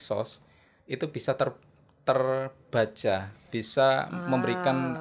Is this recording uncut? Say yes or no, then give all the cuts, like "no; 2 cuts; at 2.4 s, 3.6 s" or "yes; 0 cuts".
yes; 0 cuts